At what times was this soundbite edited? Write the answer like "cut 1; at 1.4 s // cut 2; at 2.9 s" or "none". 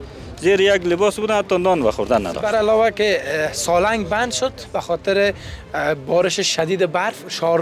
cut 1; at 2.3 s